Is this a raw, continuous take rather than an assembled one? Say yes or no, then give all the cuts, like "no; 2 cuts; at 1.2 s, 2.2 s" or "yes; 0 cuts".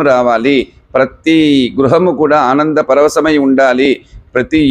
yes; 0 cuts